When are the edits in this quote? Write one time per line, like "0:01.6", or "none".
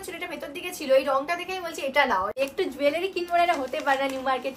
0:02.3